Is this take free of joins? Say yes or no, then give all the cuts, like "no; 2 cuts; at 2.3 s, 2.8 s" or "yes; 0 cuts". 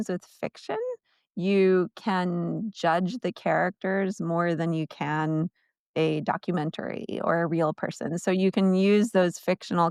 yes; 0 cuts